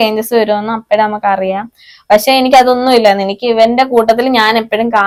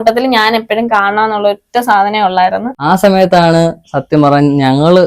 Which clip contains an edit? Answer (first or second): second